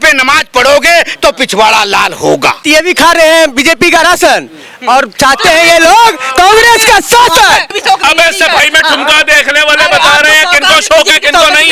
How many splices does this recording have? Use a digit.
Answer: 2